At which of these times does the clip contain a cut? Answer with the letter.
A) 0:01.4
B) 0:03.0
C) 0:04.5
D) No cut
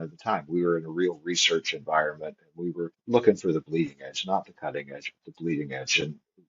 B